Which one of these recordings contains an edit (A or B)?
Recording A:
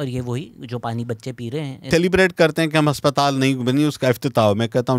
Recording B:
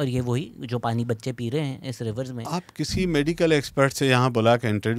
A